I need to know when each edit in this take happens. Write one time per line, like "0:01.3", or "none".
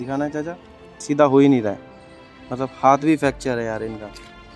0:01.0